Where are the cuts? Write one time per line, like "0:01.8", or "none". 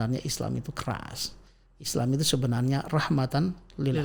none